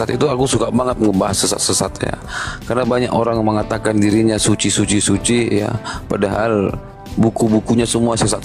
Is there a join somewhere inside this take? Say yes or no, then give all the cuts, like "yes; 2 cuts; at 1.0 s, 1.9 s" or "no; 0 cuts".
no; 0 cuts